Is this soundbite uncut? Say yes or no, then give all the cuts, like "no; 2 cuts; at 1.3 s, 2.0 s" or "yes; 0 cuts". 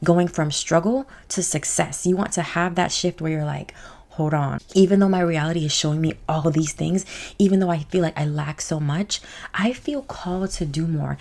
yes; 0 cuts